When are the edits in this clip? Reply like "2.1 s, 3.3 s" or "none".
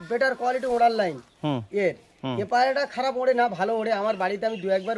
none